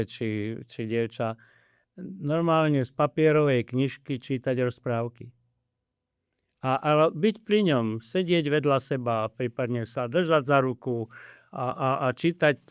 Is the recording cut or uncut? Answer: uncut